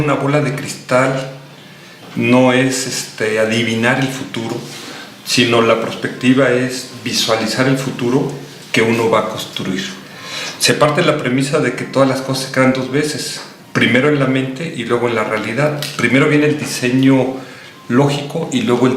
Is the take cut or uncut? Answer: uncut